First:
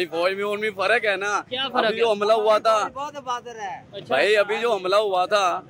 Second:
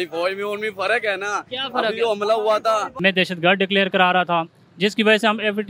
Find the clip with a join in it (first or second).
second